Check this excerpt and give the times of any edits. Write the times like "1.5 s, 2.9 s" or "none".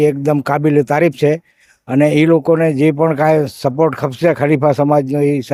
none